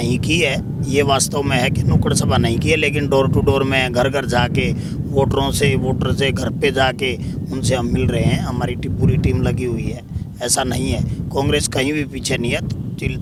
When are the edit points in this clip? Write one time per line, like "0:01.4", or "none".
none